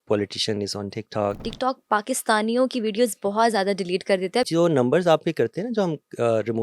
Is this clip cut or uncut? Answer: cut